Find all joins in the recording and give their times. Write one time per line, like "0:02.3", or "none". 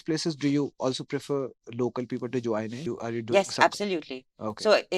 0:02.8